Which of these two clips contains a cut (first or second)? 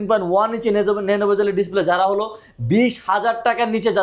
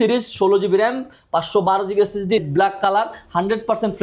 second